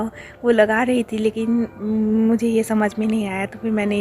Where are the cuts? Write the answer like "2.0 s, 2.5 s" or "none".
none